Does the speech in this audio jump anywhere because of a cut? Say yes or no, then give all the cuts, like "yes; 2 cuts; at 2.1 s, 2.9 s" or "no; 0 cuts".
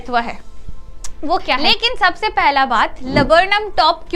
yes; 1 cut; at 1.6 s